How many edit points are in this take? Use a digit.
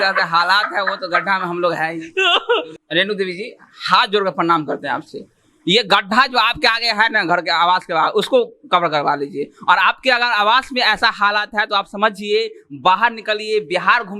1